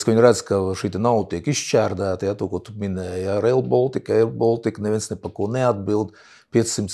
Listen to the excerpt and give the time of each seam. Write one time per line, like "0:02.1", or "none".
none